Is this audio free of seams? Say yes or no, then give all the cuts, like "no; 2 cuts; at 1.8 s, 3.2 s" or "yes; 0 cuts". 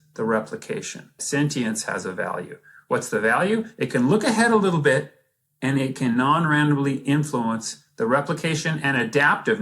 no; 1 cut; at 1.2 s